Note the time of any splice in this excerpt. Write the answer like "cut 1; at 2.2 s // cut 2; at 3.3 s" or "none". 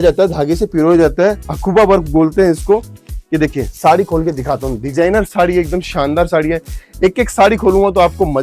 none